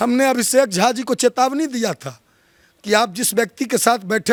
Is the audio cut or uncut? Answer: uncut